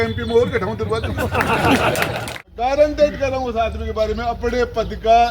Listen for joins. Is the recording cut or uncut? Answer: cut